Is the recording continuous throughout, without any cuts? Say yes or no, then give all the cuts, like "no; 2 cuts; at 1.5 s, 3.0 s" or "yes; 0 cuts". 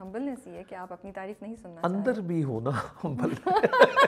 yes; 0 cuts